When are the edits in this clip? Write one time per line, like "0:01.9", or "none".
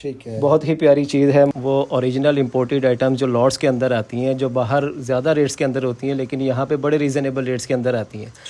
0:01.5